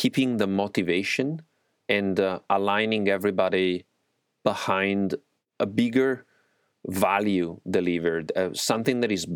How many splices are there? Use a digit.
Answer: 1